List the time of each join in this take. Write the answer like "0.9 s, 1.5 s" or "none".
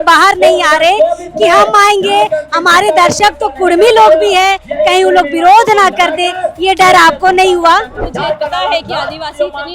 8.1 s